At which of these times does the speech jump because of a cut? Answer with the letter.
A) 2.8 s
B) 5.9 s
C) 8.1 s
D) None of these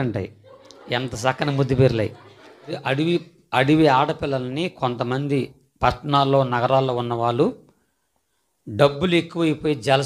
A